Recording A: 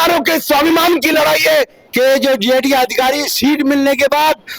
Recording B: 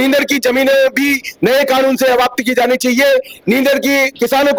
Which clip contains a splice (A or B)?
A